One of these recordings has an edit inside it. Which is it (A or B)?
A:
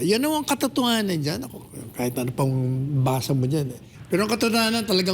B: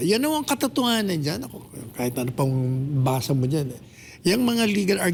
A